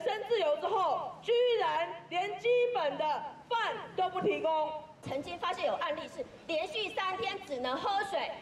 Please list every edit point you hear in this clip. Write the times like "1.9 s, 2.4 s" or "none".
5.0 s